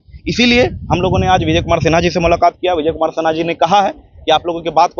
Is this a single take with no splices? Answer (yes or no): yes